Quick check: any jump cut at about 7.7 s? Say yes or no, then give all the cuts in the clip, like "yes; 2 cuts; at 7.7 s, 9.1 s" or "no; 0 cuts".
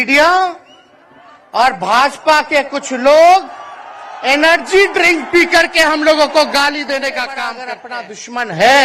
yes; 1 cut; at 7.7 s